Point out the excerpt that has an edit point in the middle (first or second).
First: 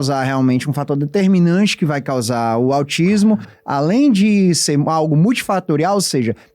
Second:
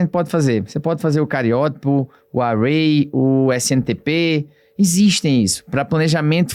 first